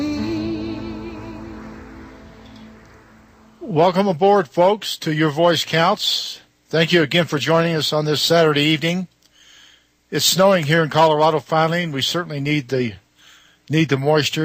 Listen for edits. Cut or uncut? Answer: uncut